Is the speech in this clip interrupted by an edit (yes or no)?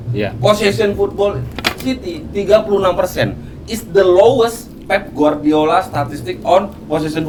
no